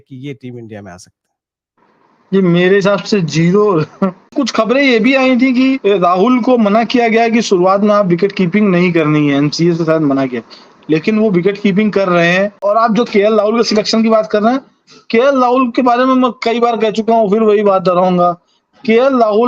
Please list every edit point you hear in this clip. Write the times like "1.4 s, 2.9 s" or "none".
4.3 s, 5.8 s, 12.6 s